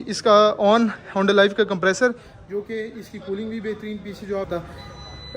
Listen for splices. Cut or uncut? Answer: cut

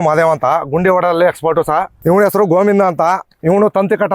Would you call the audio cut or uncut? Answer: cut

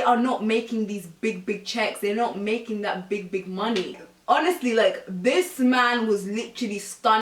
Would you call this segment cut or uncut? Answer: cut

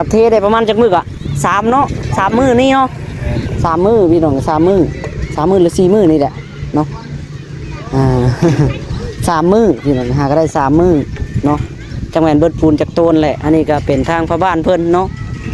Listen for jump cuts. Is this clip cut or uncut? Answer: uncut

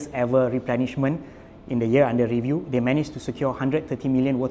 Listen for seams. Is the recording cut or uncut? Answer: uncut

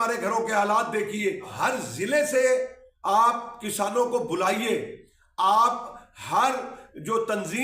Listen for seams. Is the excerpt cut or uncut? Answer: cut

